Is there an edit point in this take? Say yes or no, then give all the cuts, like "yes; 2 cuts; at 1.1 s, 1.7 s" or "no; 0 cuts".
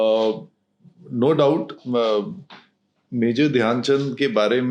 no; 0 cuts